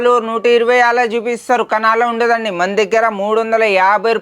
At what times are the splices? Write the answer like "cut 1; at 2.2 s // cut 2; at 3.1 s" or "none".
none